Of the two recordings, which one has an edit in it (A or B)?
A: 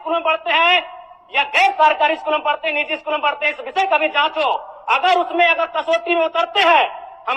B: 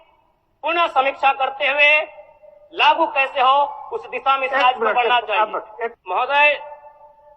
B